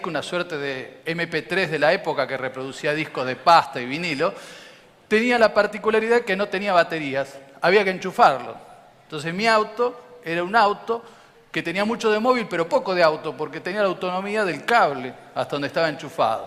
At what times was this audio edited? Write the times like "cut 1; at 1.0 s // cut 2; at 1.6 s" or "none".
none